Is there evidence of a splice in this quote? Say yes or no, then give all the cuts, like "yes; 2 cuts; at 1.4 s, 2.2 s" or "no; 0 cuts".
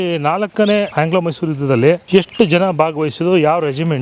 yes; 2 cuts; at 0.9 s, 2.0 s